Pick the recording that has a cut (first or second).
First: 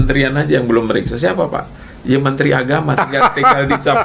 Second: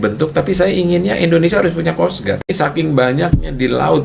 second